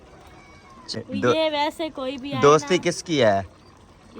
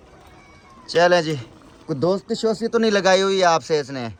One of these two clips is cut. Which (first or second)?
first